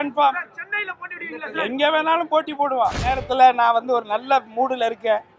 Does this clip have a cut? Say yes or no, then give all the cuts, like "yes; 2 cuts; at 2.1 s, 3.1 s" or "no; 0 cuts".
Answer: yes; 1 cut; at 3.2 s